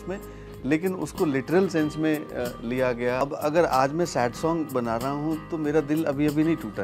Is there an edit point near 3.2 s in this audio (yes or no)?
yes